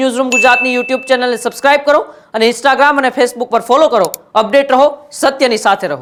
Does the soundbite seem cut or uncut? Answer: uncut